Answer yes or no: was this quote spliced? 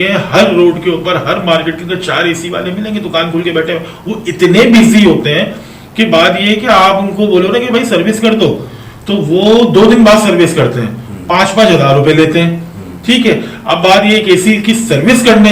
no